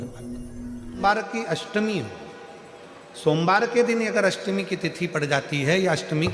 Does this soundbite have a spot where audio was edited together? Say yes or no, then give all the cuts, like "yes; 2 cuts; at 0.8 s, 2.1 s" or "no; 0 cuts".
yes; 1 cut; at 1.0 s